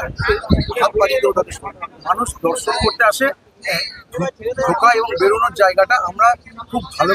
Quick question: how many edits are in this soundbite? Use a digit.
1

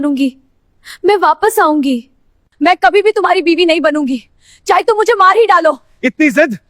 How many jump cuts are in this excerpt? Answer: 1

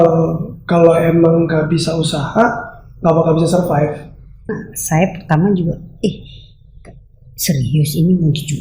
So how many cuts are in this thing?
1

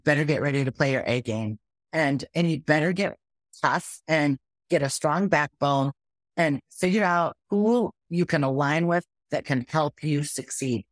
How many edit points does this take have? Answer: 0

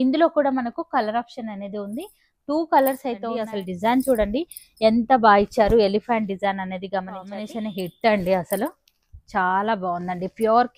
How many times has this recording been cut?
2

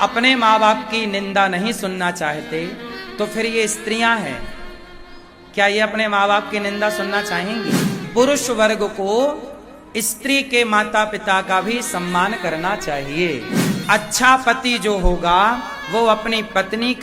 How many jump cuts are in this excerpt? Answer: 2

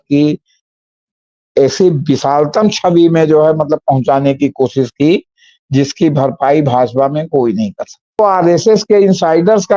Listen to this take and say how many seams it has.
1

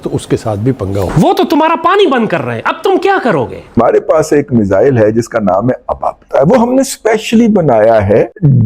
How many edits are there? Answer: 1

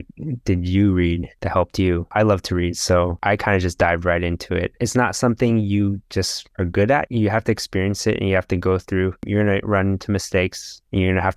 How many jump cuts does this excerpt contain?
3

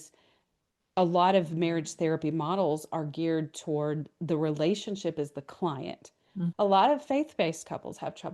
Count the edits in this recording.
1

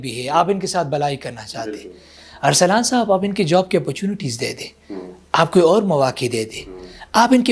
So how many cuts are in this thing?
0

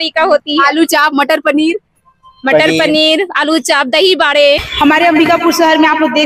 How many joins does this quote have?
1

